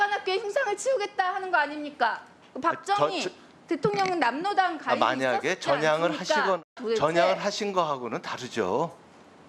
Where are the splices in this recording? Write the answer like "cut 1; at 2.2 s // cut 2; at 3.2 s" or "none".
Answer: cut 1; at 6.7 s